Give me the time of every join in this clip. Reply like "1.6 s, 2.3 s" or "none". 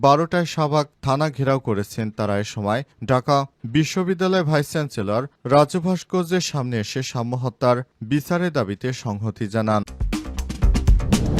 10.0 s